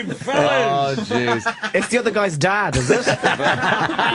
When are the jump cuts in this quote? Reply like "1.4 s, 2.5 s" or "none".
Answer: none